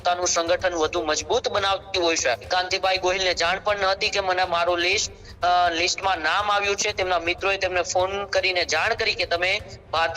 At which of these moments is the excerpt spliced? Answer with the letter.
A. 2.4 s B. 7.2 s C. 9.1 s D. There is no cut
A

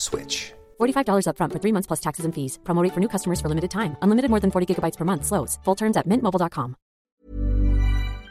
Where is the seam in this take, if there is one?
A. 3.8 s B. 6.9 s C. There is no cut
B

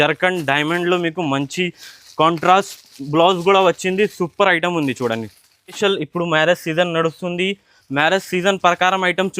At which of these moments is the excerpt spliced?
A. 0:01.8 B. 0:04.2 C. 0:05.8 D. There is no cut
C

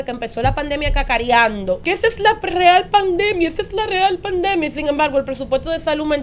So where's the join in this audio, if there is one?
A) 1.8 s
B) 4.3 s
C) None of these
A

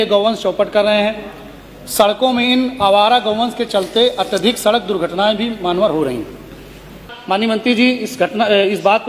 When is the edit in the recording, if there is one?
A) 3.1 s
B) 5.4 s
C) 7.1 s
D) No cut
C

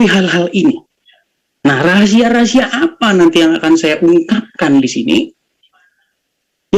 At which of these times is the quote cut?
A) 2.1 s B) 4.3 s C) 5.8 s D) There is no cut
D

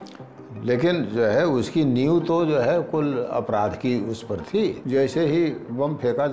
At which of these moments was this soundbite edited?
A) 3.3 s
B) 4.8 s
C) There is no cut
B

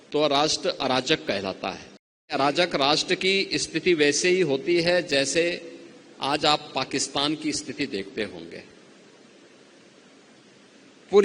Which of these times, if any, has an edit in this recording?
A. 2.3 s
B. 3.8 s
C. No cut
A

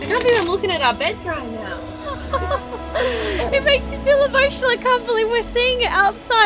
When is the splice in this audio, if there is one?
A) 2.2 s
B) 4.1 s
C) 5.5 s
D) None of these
A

